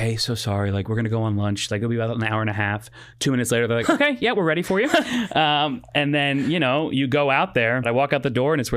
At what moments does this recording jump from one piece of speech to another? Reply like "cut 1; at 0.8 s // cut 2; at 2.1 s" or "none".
cut 1; at 7.9 s